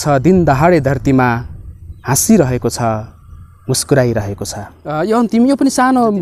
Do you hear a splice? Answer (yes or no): yes